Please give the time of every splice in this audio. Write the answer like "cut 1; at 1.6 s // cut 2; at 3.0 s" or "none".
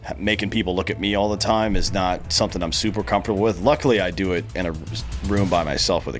none